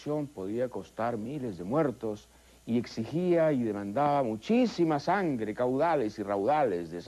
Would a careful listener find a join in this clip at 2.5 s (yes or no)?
yes